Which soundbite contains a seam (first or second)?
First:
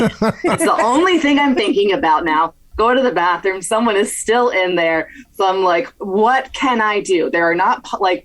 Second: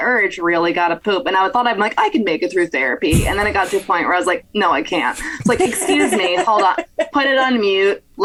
first